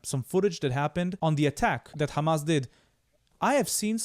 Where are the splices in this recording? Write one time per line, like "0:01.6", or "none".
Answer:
0:01.1
0:01.9